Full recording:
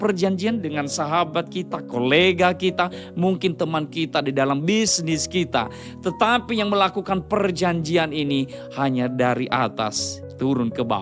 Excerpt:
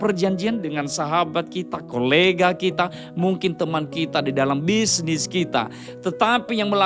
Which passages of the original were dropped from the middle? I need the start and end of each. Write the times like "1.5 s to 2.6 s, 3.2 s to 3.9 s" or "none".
none